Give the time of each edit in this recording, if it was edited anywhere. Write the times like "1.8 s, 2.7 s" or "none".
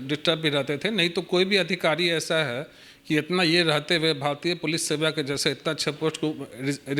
none